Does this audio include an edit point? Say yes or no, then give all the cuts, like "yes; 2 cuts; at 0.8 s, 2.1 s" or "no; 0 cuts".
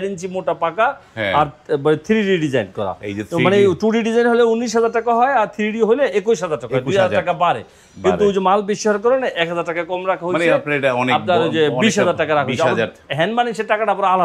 no; 0 cuts